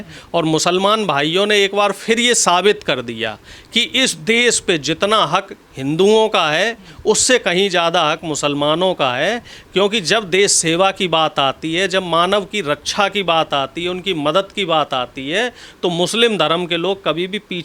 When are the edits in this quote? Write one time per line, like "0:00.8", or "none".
none